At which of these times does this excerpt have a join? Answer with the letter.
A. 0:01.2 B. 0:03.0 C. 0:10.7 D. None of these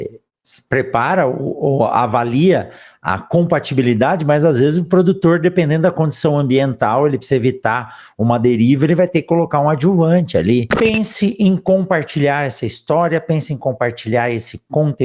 C